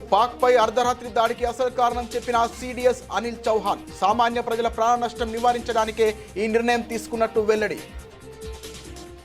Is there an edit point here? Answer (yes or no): yes